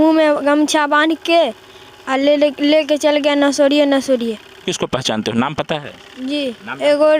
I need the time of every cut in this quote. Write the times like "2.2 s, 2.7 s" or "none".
4.6 s